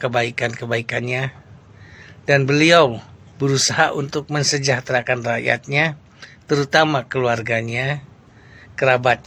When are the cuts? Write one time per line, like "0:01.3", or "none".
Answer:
none